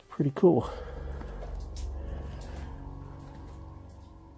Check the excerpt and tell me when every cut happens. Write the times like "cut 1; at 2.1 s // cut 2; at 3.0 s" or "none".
cut 1; at 1.1 s